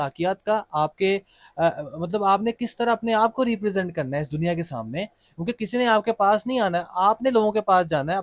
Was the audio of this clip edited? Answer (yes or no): no